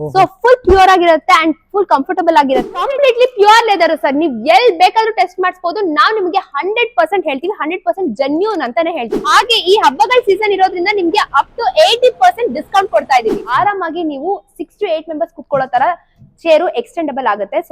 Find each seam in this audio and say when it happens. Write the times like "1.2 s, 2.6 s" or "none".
2.7 s, 9.1 s, 13.4 s

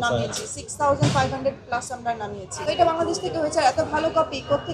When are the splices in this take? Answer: 2.6 s

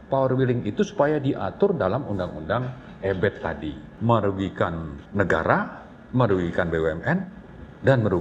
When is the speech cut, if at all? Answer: 3.9 s, 5.0 s

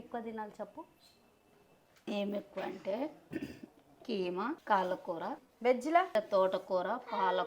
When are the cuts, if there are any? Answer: 4.6 s, 5.5 s, 6.1 s

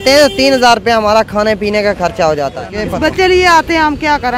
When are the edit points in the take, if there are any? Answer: 2.7 s

